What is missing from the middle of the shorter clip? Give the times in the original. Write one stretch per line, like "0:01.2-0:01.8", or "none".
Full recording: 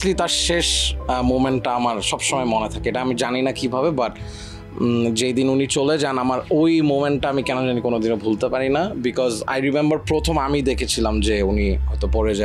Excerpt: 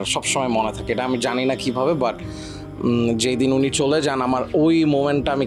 none